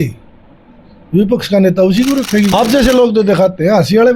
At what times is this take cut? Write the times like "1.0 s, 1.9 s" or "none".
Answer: 2.5 s

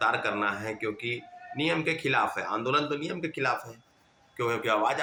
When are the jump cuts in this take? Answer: none

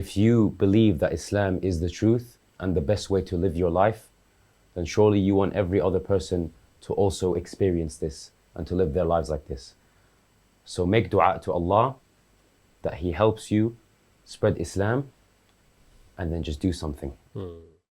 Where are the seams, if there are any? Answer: none

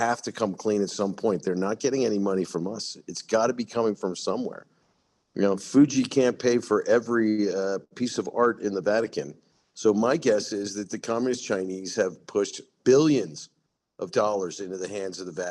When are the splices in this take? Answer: 12.7 s

